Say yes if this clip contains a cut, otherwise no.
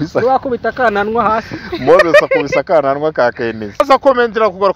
yes